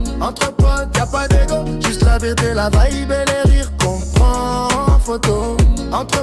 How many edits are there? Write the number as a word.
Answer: zero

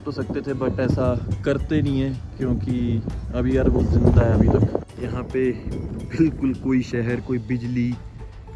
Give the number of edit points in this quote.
one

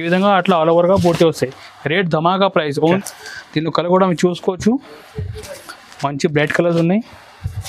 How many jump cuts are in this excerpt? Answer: one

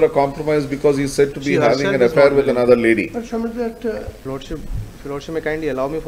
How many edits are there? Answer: one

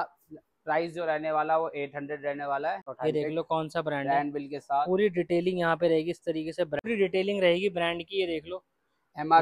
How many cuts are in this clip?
two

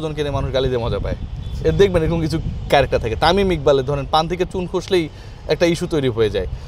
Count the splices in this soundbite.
zero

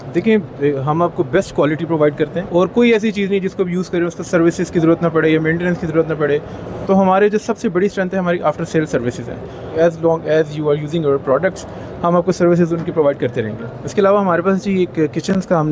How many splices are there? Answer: zero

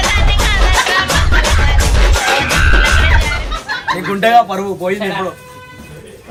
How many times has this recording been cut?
zero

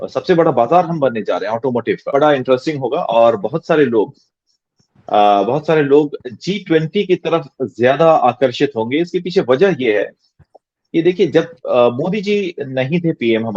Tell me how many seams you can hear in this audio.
one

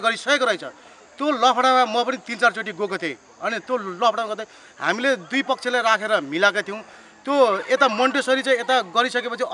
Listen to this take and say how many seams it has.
zero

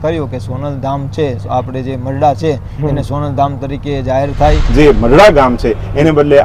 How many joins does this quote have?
one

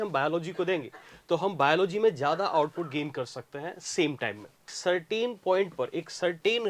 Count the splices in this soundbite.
one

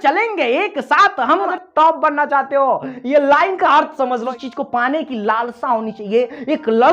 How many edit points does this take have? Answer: two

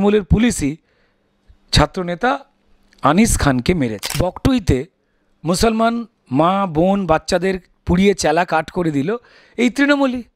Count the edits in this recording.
one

